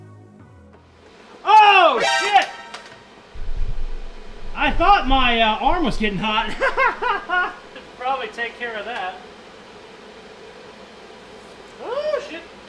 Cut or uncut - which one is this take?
uncut